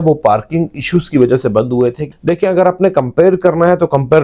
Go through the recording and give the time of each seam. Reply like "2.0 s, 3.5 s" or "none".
2.1 s